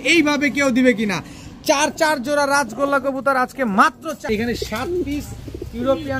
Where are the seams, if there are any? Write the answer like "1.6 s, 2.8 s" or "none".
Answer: 4.3 s